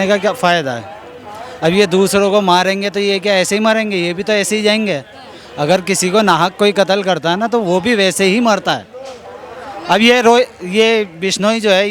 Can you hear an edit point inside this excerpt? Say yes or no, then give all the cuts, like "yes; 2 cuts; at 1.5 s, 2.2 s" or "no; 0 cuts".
no; 0 cuts